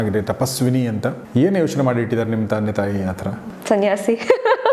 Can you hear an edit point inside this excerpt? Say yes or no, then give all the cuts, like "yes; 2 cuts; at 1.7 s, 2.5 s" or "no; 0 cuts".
yes; 2 cuts; at 1.2 s, 3.2 s